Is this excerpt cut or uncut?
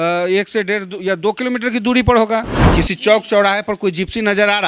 cut